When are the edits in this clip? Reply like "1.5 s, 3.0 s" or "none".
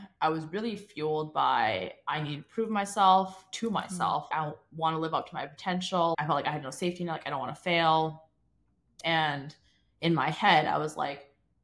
4.3 s, 6.1 s, 8.9 s